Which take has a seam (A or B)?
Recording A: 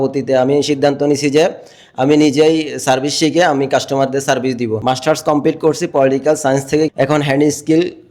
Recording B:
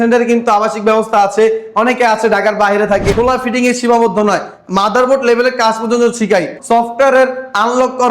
B